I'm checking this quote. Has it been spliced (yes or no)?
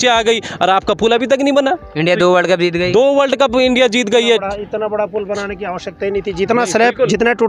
no